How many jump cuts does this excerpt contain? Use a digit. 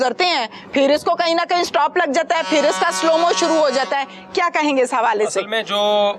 0